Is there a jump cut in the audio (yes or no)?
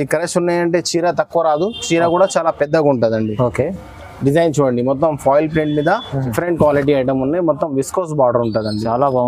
yes